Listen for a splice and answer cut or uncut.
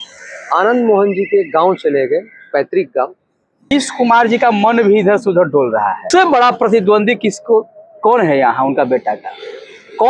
cut